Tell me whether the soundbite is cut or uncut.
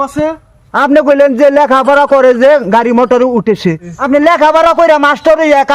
cut